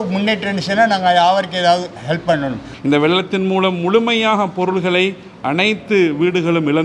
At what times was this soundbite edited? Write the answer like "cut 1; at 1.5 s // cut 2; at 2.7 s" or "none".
cut 1; at 2.6 s